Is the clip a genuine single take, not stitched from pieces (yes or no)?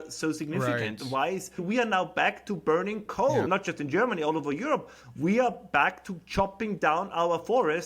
no